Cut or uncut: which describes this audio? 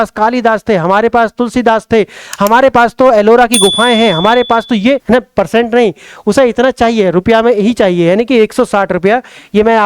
cut